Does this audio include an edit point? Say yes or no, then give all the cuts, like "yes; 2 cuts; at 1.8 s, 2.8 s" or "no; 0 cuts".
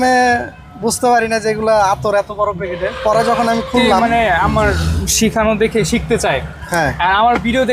yes; 1 cut; at 4.0 s